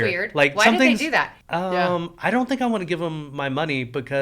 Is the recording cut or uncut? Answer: cut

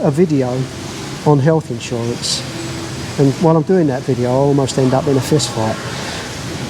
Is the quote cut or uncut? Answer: uncut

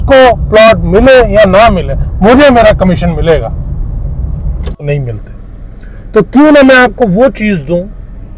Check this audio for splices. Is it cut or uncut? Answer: cut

